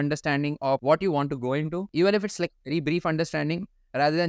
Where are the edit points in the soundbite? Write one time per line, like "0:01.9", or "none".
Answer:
0:00.8
0:01.8